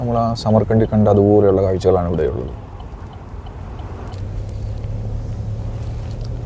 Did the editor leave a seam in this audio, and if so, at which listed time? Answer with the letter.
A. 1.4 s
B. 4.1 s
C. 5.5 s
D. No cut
B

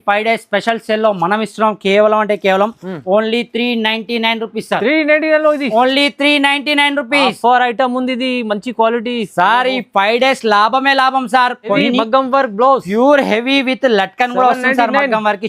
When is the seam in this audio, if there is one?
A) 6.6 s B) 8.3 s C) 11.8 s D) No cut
C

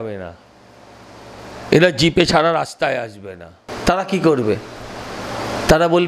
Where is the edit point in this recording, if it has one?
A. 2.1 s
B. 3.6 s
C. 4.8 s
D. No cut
B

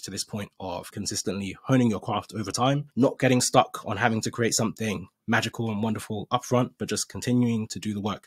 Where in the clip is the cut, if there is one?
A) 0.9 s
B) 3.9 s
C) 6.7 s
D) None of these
A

